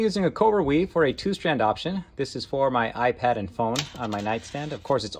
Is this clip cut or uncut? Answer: uncut